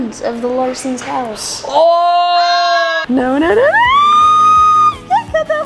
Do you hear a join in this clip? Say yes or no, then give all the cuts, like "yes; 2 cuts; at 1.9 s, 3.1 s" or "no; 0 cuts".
yes; 1 cut; at 3.0 s